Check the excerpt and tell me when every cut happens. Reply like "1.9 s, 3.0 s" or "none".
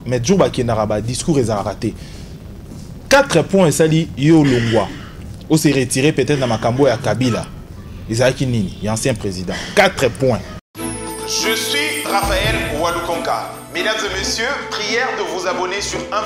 10.6 s

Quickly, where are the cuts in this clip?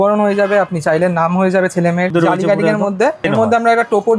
2.1 s, 3.3 s

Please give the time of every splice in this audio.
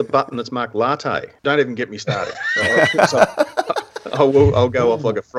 1.4 s

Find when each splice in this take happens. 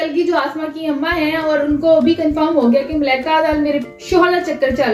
none

